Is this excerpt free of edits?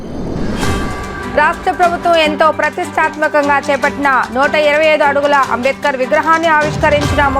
no; 1 cut; at 0.9 s

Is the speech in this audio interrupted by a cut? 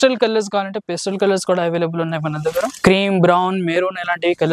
yes; 1 cut; at 2.7 s

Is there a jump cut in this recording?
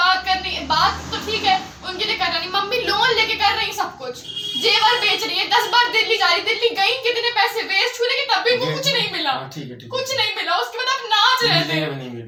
no; 0 cuts

